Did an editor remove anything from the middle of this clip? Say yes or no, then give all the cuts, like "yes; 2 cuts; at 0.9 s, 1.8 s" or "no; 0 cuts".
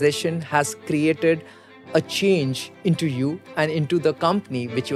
no; 0 cuts